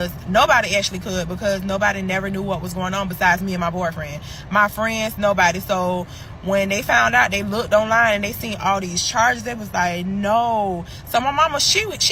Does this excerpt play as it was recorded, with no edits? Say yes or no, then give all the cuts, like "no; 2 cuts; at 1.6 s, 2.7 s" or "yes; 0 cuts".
yes; 0 cuts